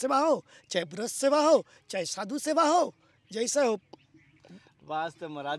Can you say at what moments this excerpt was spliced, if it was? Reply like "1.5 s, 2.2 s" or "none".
none